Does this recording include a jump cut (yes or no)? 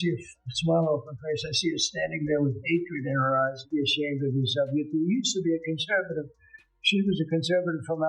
yes